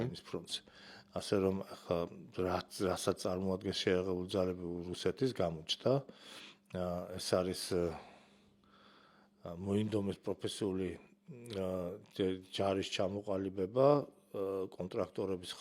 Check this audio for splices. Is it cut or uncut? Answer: uncut